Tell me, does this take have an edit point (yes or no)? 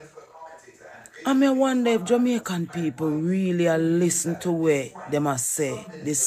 no